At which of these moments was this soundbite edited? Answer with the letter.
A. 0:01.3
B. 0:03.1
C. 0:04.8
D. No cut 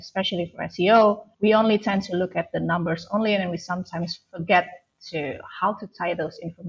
A